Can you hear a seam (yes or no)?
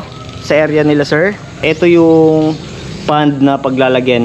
yes